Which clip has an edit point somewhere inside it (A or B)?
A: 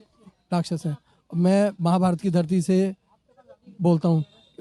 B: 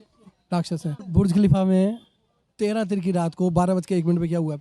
B